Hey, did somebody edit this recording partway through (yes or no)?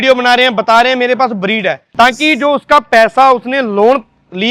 yes